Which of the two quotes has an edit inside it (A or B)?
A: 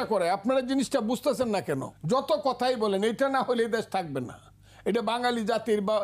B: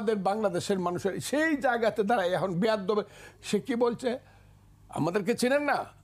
A